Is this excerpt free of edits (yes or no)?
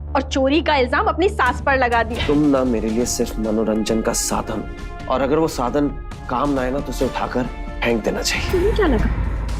no